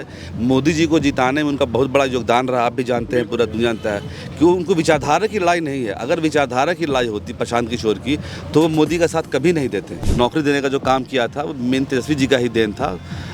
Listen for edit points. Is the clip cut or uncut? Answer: cut